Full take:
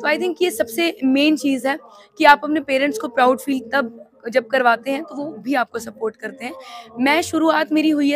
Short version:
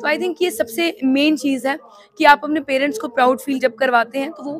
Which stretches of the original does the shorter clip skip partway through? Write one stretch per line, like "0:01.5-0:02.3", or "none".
0:03.6-0:04.3